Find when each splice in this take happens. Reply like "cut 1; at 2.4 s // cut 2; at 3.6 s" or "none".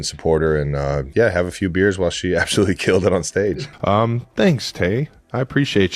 cut 1; at 1.1 s // cut 2; at 3.7 s